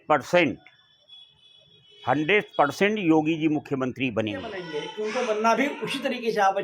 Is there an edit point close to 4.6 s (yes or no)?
yes